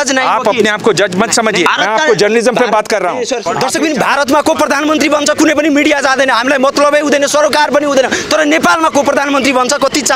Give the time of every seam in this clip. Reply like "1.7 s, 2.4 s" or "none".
1.7 s, 3.4 s